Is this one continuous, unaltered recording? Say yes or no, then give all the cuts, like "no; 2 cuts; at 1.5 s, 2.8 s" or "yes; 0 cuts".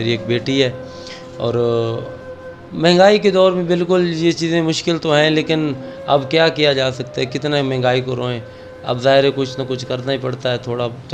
yes; 0 cuts